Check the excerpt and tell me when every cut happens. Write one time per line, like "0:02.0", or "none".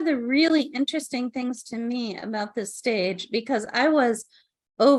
none